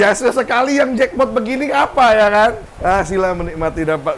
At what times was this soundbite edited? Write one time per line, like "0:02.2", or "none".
0:02.7

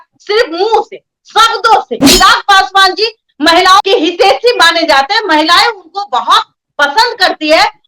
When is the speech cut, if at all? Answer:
0:02.0

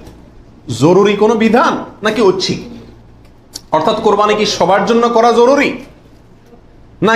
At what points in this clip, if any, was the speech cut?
none

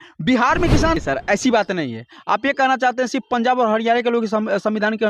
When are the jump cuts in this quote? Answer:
0:01.0

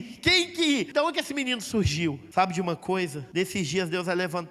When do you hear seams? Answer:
0:00.9
0:02.2
0:03.2

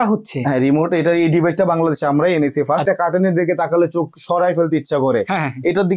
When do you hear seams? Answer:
0:02.8

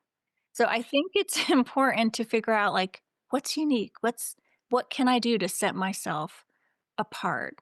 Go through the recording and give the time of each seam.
none

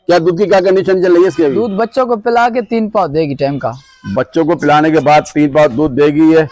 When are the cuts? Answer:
none

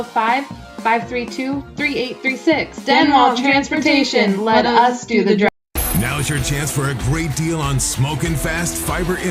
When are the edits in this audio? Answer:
0:05.5

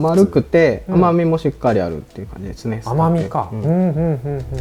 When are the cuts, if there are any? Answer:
none

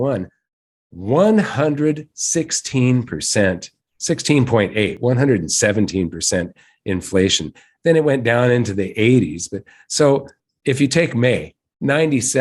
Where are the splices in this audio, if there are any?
none

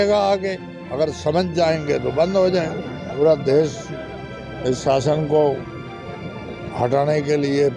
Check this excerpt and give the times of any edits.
0:03.1

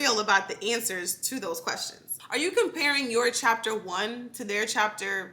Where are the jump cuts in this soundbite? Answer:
0:02.1

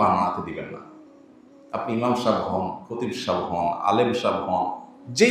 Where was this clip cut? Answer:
none

